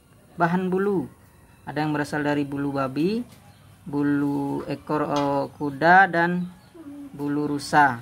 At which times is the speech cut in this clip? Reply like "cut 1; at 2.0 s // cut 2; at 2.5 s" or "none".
none